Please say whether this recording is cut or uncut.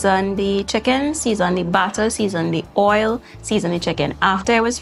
uncut